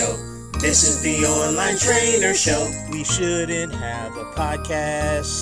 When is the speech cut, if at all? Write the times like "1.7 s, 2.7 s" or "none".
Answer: none